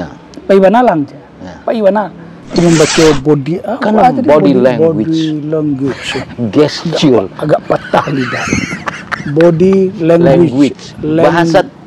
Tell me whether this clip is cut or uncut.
cut